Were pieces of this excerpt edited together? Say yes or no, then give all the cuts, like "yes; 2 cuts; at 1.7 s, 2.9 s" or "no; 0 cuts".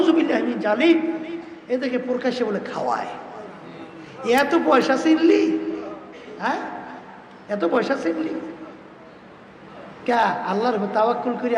no; 0 cuts